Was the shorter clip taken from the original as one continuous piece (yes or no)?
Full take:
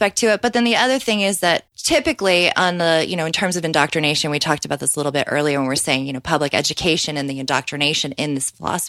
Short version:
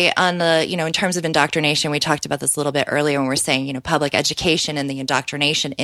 yes